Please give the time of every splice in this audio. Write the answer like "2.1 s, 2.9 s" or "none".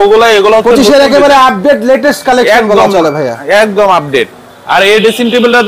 none